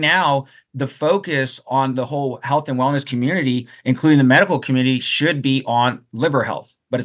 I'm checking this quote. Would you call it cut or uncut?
uncut